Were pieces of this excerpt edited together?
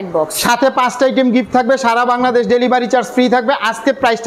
no; 0 cuts

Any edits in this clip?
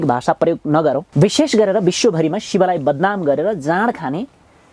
yes; 1 cut; at 1.1 s

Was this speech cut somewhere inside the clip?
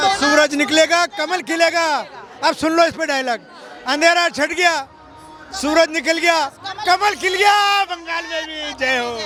no; 0 cuts

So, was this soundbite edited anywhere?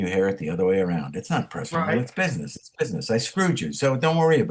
no; 0 cuts

